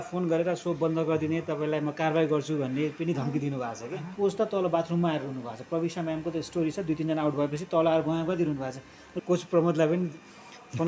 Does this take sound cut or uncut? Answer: cut